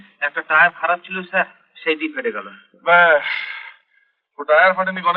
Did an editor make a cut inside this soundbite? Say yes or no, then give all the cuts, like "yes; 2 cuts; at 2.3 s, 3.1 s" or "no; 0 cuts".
no; 0 cuts